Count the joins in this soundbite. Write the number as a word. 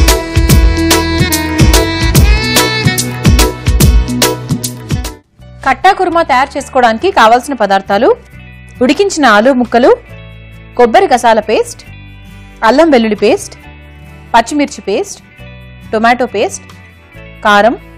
one